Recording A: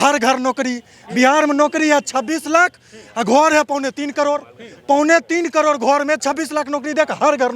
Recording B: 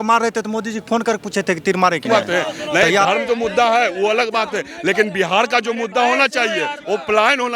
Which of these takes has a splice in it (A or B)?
B